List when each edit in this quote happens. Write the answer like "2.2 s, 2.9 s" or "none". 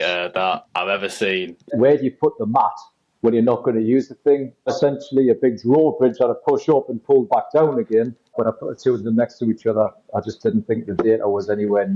1.7 s, 4.7 s, 8.3 s

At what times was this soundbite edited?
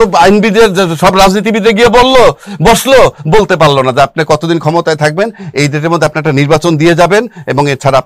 none

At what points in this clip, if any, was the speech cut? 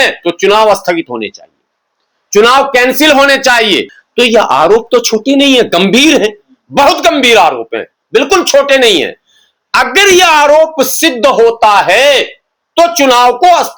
4.0 s

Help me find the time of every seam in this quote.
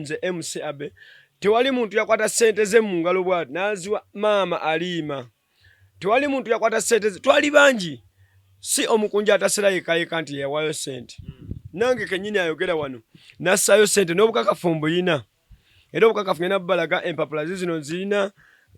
none

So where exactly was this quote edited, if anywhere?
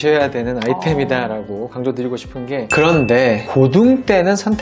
2.7 s

